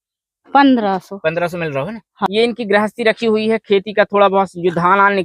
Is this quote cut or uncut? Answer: cut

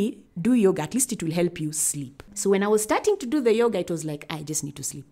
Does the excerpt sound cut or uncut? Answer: uncut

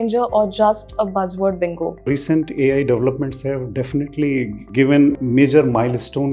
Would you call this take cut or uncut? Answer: cut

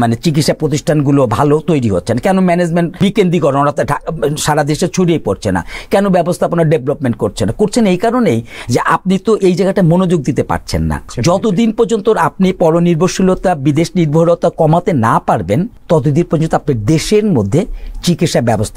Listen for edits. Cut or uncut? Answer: cut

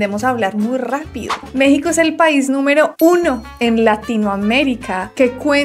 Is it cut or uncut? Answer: cut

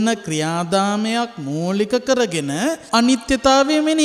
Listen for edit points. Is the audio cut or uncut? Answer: cut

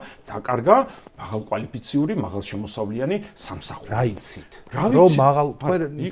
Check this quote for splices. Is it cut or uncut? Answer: uncut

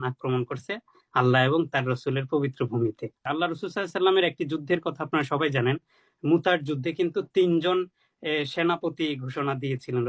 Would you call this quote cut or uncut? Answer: cut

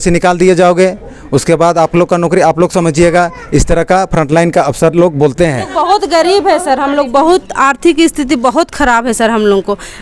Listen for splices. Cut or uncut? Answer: cut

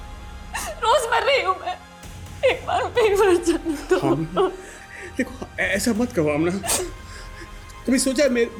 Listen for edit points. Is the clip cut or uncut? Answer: uncut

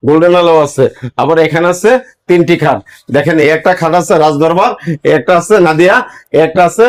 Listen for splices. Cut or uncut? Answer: uncut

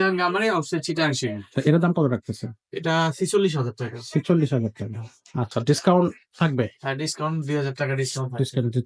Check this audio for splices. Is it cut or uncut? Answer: uncut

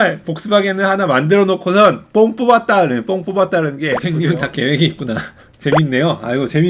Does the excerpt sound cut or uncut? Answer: cut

